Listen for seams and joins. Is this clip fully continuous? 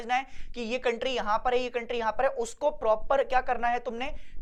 yes; 0 cuts

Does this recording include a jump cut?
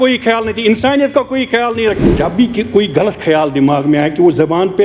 yes; 1 cut; at 2.1 s

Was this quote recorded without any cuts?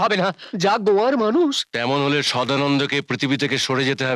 yes; 0 cuts

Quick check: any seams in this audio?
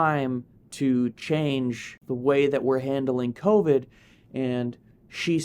yes; 1 cut; at 2.0 s

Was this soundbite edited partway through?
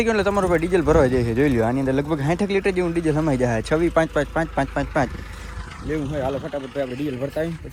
no; 0 cuts

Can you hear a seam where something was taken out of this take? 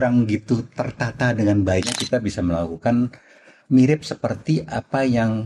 yes; 1 cut; at 2.0 s

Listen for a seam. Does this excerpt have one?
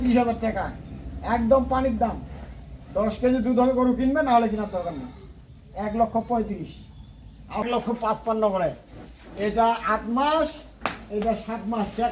yes; 1 cut; at 7.7 s

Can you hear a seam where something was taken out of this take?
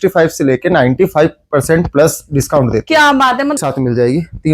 yes; 1 cut; at 3.6 s

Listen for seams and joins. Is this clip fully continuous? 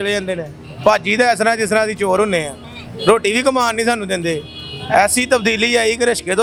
yes; 0 cuts

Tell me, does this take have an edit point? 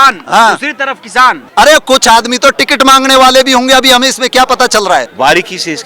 yes; 2 cuts; at 1.4 s, 5.1 s

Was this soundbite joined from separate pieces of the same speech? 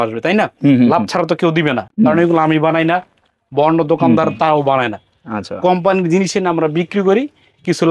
no; 0 cuts

